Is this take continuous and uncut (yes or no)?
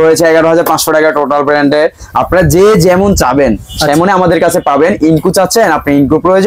yes